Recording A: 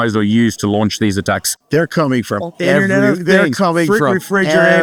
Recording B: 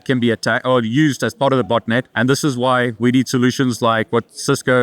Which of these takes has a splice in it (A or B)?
B